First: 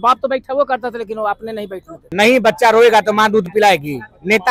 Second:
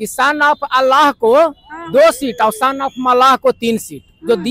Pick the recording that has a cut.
first; 1 cut; at 2.1 s

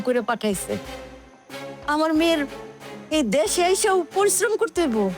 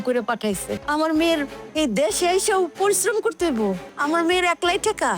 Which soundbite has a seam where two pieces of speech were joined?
second; 3 cuts; at 0.8 s, 1.6 s, 3.9 s

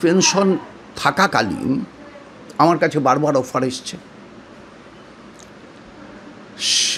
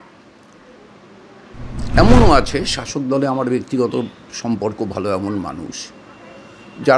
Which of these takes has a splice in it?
second; 1 cut; at 1.5 s

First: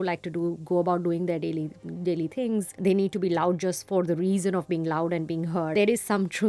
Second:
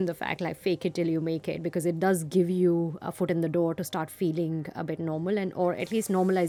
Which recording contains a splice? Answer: first; 3 cuts; at 2.7 s, 3.8 s, 5.7 s

